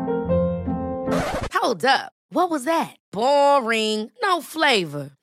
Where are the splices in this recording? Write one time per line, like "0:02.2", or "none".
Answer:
none